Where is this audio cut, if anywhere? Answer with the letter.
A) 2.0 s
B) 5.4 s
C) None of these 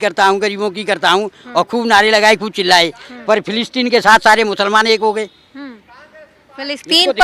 C